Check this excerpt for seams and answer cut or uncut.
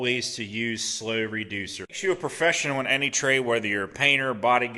cut